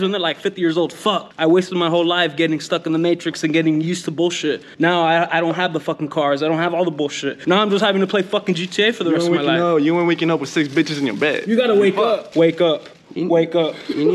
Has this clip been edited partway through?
no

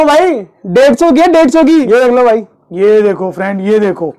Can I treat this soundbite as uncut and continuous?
yes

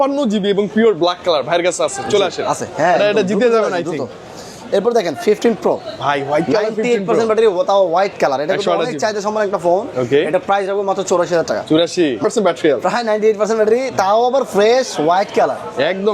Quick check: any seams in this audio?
no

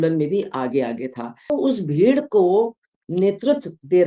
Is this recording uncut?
no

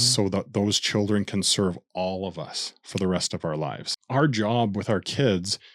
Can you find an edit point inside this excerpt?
yes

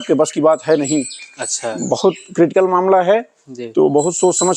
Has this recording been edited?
no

